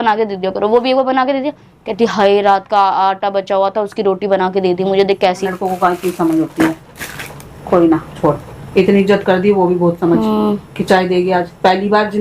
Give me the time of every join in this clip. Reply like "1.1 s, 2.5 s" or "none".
5.5 s